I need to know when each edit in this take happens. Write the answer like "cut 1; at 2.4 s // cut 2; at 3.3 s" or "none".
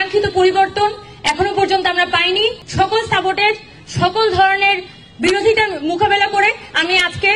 cut 1; at 2.6 s